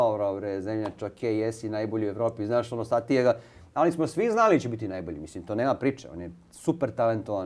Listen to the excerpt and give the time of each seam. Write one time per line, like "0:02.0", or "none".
none